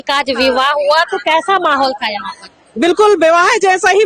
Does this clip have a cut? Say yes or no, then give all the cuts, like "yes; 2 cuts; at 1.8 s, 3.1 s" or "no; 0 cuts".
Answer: no; 0 cuts